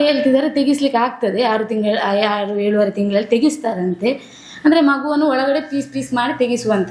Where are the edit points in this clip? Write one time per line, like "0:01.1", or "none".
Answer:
none